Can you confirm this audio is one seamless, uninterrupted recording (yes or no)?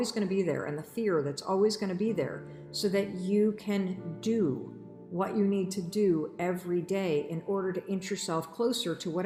yes